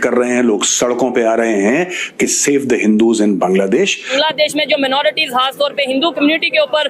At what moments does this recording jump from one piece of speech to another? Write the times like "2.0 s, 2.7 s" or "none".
4.1 s